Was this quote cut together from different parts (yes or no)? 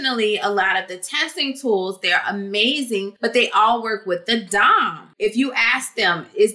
yes